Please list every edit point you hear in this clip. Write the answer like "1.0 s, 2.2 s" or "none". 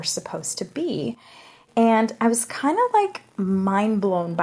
none